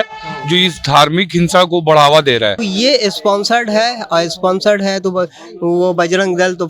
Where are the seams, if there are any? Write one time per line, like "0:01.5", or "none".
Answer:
0:02.6